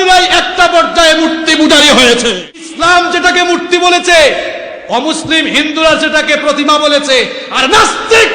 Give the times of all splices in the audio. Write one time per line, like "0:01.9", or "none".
0:02.7